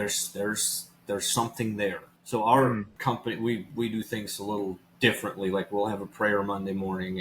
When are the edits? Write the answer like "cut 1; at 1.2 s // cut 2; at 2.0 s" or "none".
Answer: cut 1; at 2.1 s // cut 2; at 2.9 s // cut 3; at 4.9 s